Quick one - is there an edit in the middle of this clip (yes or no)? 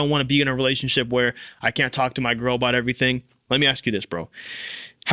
no